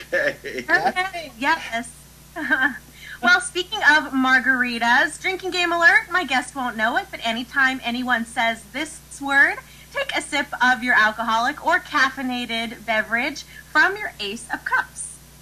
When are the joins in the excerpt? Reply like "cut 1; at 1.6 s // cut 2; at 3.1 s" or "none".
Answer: cut 1; at 11.2 s